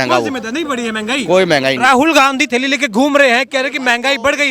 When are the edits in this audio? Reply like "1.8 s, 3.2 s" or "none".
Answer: none